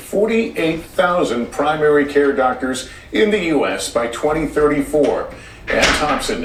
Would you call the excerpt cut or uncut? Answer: uncut